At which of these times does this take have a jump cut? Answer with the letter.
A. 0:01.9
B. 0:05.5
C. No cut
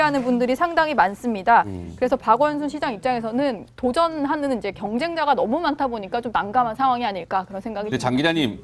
B